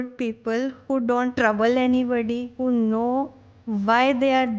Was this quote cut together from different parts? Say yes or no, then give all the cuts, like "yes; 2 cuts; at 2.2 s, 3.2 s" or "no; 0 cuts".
yes; 2 cuts; at 1.3 s, 2.5 s